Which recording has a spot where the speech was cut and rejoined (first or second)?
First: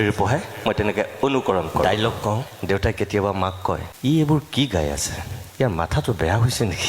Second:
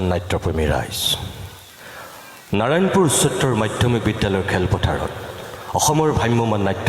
first